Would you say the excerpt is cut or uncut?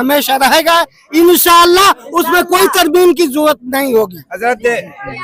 uncut